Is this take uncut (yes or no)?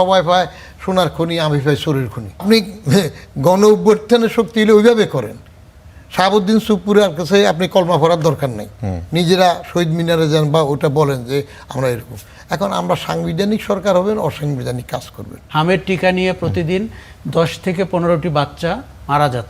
no